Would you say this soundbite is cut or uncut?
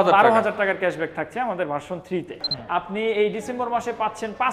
cut